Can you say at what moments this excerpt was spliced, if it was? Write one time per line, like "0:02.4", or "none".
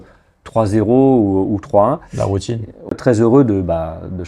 0:02.9